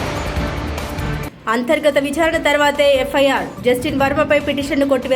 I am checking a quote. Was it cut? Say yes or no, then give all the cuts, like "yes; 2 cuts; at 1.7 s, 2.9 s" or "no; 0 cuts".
yes; 1 cut; at 1.1 s